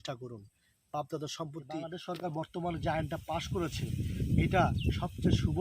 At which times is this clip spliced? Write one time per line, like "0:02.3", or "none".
0:01.9